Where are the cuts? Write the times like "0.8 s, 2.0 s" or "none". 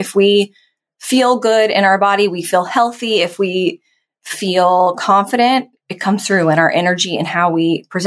none